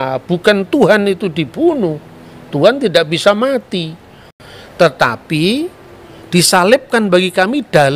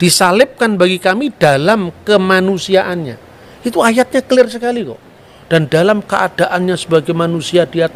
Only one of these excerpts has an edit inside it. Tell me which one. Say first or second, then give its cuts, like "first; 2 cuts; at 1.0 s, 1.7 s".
first; 1 cut; at 4.2 s